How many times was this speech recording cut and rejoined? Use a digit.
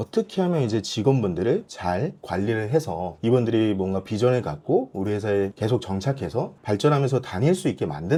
0